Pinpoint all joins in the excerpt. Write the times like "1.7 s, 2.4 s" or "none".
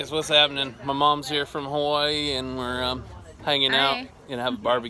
none